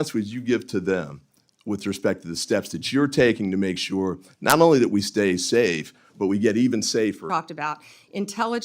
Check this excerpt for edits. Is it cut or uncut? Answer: cut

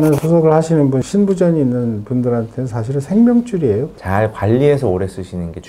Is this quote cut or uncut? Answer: cut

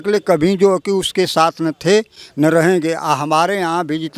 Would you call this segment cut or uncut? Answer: uncut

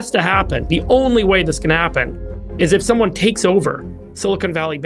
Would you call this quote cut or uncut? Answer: uncut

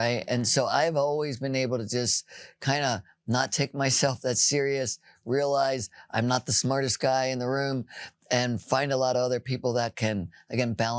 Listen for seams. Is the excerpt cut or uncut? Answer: uncut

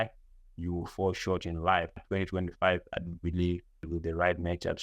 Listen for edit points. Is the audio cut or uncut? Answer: cut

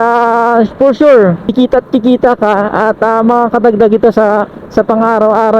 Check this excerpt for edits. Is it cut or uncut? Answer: cut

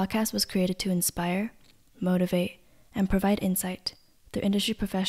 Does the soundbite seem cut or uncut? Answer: uncut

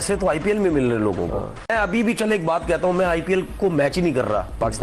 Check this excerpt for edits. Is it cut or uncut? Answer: uncut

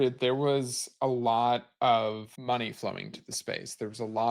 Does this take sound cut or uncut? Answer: cut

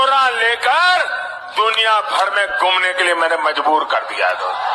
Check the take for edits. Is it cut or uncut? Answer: uncut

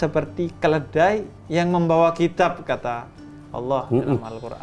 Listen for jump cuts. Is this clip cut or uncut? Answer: uncut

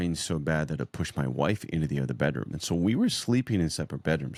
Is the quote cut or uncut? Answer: uncut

